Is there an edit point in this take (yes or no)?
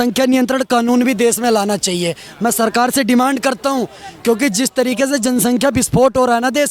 no